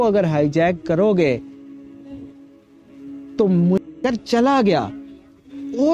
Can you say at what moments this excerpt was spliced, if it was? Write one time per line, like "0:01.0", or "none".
0:03.9